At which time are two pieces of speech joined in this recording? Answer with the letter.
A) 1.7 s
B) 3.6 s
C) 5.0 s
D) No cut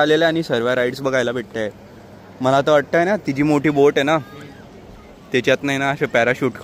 D